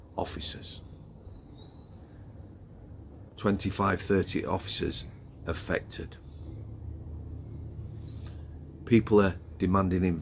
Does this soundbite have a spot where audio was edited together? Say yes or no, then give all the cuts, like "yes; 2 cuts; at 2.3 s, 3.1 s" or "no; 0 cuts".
no; 0 cuts